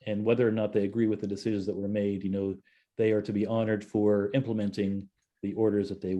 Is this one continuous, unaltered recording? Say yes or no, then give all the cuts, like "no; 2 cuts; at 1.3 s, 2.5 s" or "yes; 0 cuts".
no; 1 cut; at 5.3 s